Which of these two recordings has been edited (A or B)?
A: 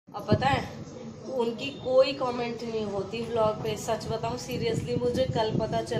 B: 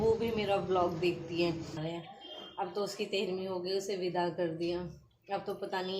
B